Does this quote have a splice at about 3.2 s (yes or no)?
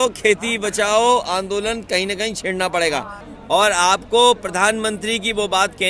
yes